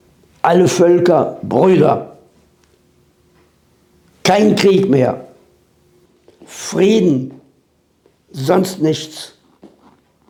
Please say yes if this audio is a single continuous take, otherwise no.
yes